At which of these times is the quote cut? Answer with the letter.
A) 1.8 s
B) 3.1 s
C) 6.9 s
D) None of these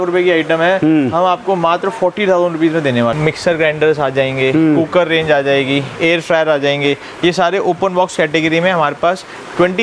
B